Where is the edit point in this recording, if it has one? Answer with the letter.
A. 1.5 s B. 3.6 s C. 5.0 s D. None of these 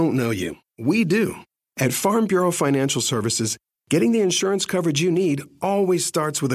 A